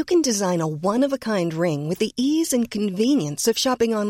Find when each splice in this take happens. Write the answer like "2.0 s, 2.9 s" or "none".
none